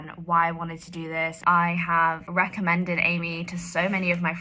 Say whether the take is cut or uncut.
cut